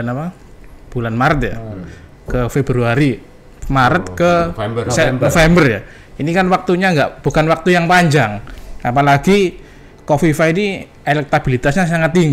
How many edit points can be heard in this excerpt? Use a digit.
0